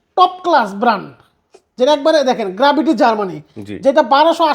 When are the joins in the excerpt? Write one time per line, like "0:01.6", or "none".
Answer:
none